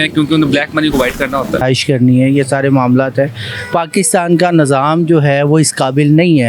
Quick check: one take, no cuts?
no; 1 cut; at 1.6 s

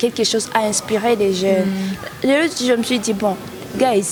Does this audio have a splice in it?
no; 0 cuts

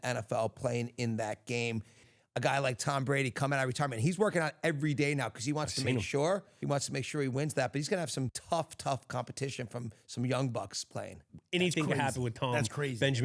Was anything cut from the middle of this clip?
yes; 4 cuts; at 2.1 s, 6.5 s, 8.4 s, 11.3 s

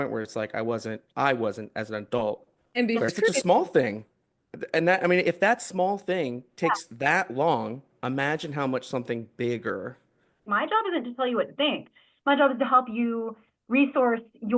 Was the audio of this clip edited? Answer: yes; 1 cut; at 10.4 s

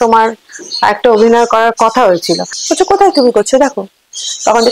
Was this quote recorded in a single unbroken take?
no; 1 cut; at 2.6 s

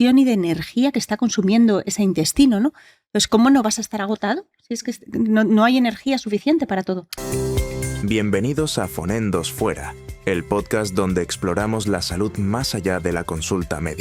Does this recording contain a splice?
yes; 1 cut; at 7.1 s

